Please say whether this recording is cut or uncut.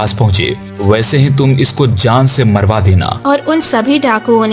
cut